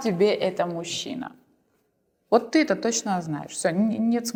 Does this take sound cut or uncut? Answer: uncut